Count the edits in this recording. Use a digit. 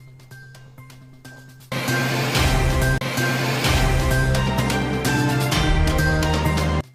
0